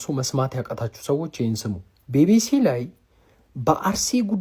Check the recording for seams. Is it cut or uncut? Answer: cut